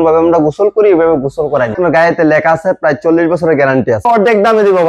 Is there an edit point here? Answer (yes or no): yes